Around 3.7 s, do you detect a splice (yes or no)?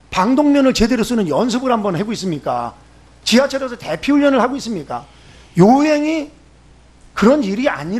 yes